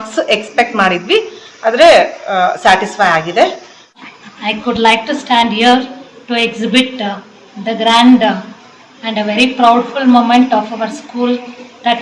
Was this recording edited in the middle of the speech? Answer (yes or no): yes